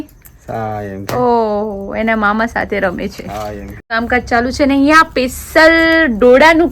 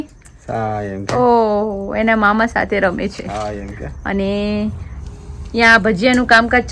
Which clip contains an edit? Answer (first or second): first